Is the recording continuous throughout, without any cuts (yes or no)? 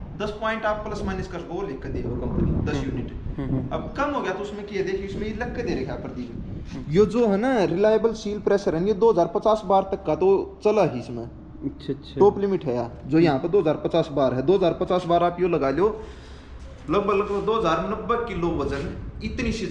yes